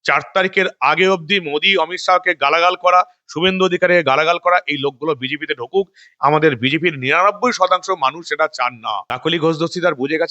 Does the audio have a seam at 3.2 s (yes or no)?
no